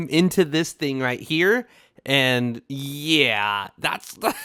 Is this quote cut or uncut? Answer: uncut